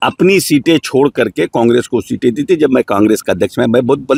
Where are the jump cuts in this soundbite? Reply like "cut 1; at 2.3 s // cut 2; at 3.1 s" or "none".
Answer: none